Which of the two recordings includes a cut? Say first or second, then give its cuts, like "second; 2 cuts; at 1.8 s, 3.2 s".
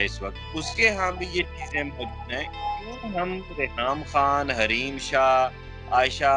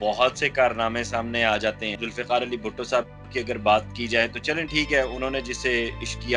second; 1 cut; at 2.0 s